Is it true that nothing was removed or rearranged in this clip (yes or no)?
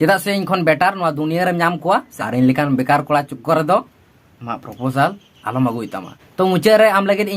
no